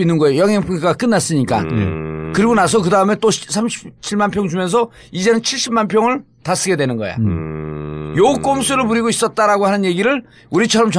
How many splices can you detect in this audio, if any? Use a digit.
0